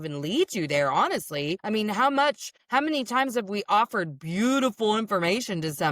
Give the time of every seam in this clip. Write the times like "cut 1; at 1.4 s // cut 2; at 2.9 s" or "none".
cut 1; at 1.6 s // cut 2; at 2.5 s